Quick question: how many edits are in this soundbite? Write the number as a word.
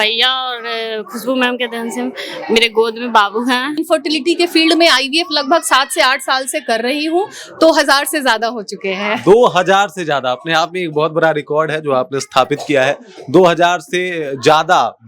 one